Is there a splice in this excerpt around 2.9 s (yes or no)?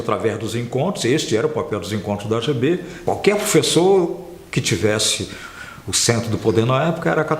yes